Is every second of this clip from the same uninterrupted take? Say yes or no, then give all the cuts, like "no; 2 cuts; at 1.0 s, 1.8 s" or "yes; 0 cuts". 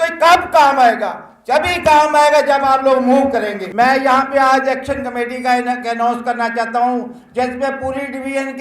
yes; 0 cuts